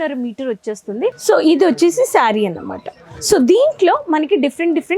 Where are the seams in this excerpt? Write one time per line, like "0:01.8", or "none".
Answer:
0:01.2